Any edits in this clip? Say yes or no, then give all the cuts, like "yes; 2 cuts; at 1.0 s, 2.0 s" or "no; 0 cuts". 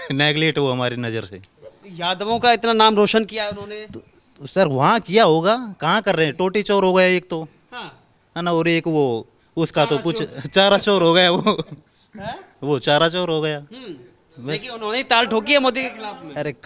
no; 0 cuts